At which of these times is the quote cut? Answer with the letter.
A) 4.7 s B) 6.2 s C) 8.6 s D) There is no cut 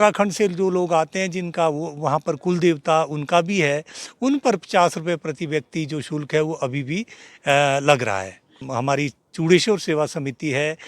C